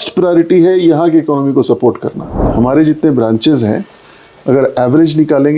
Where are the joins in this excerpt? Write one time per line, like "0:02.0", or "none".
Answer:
0:02.4